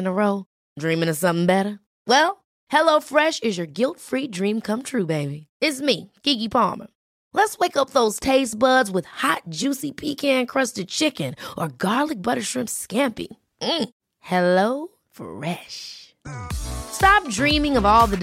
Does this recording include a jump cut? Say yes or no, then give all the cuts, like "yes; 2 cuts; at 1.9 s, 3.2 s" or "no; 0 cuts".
no; 0 cuts